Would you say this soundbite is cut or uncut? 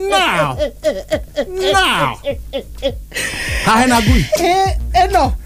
uncut